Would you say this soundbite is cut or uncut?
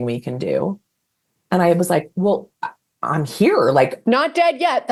uncut